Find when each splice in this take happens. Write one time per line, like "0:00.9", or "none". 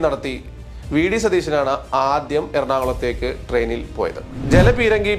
0:04.2